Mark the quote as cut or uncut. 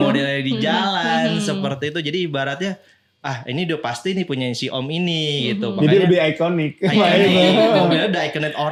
uncut